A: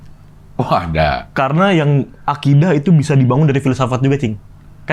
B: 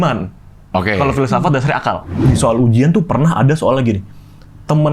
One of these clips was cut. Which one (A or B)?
B